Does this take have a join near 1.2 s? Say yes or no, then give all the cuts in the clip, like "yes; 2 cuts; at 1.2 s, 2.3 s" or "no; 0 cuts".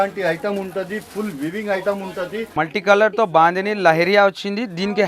no; 1 cut; at 2.5 s